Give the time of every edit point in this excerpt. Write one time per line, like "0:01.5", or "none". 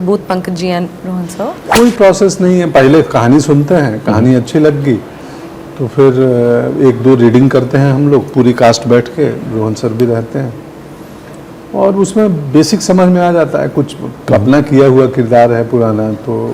0:01.6

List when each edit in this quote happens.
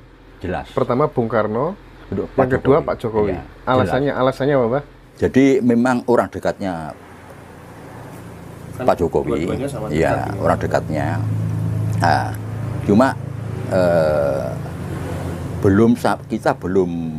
0:05.0

